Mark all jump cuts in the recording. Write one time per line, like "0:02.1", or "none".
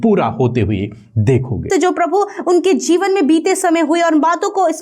0:01.7